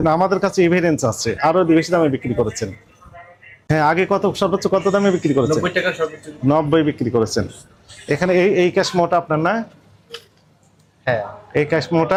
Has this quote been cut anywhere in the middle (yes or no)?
no